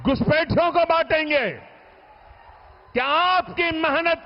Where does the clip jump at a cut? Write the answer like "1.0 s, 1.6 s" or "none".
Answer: none